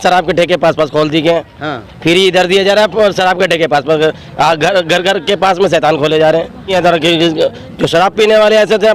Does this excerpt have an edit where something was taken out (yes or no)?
yes